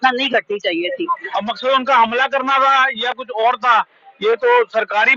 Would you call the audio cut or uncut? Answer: cut